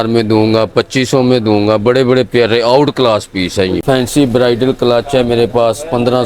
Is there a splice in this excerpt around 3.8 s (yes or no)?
yes